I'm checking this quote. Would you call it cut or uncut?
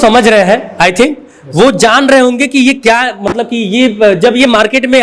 uncut